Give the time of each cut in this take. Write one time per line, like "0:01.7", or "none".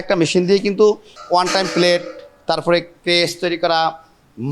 0:01.2